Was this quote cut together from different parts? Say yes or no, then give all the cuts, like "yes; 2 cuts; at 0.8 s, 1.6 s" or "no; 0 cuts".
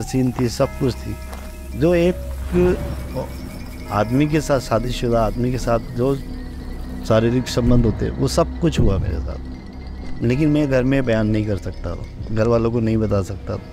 no; 0 cuts